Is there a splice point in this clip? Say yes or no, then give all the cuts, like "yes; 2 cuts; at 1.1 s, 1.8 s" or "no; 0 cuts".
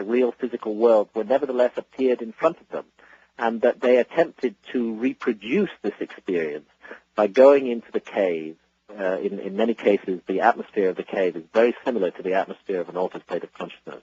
no; 0 cuts